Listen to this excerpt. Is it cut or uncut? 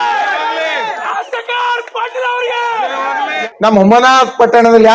cut